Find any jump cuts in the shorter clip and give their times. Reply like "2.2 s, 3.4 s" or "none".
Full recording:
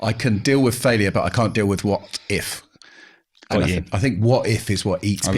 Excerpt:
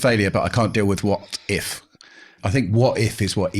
2.4 s